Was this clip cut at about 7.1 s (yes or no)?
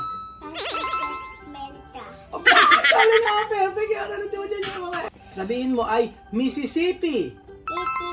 no